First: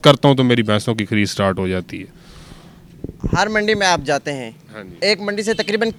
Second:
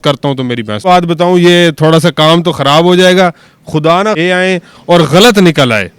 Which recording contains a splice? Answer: second; 2 cuts; at 0.8 s, 4.2 s

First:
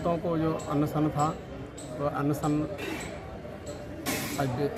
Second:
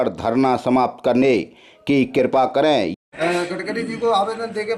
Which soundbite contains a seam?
second; 1 cut; at 2.9 s

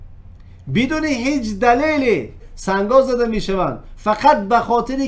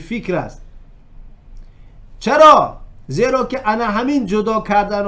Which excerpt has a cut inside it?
first; 1 cut; at 2.4 s

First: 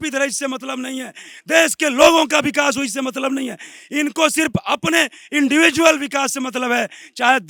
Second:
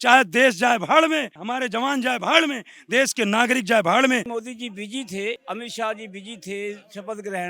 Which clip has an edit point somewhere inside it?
second; 3 cuts; at 1.4 s, 4.3 s, 5.4 s

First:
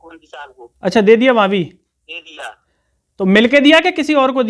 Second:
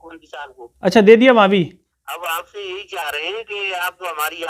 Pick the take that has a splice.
second; 1 cut; at 1.9 s

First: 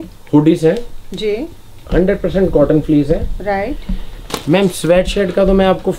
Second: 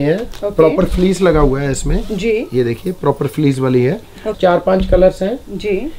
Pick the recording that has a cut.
second; 1 cut; at 4.3 s

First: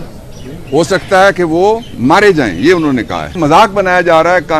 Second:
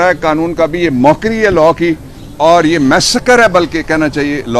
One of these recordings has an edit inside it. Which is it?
first; 1 cut; at 3.3 s

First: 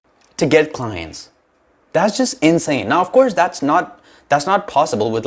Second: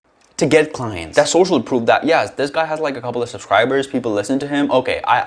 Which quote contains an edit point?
second; 1 cut; at 1.0 s

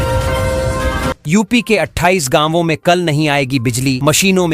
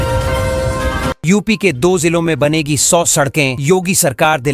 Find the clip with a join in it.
first; 1 cut; at 1.2 s

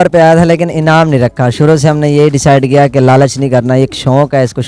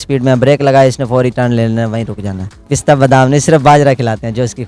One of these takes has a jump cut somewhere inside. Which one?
second; 1 cut; at 2.7 s

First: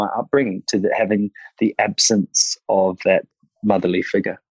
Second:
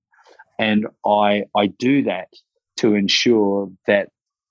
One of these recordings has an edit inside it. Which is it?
first; 1 cut; at 3.3 s

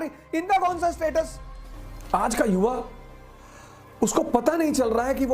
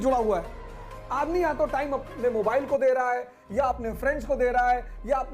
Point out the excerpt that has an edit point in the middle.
first; 1 cut; at 1.9 s

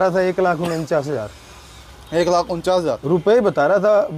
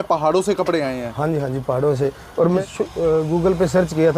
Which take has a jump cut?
second; 1 cut; at 2.6 s

